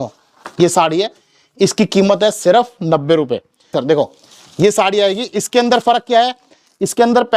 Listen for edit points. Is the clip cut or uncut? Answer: cut